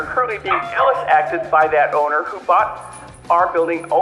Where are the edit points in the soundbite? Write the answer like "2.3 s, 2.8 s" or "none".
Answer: none

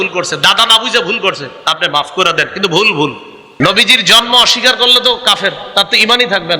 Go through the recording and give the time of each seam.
3.5 s

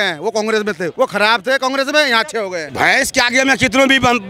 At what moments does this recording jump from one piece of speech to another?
0.9 s, 2.6 s

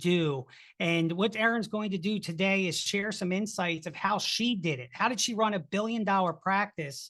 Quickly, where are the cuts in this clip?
none

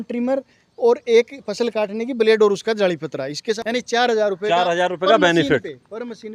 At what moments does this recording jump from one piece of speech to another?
3.6 s

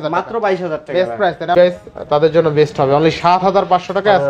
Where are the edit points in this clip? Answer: 1.5 s

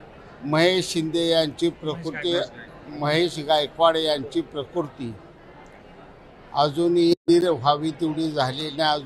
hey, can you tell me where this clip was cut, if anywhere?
7.1 s

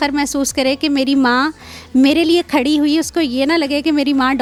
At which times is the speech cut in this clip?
none

